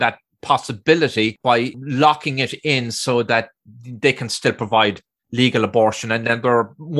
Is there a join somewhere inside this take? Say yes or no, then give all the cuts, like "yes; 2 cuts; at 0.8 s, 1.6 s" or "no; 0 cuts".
yes; 1 cut; at 1.4 s